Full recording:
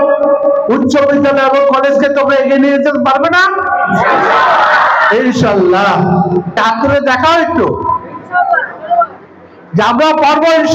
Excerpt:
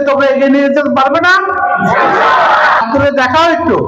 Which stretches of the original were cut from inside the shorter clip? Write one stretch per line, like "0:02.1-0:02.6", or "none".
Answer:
0:04.9-0:06.7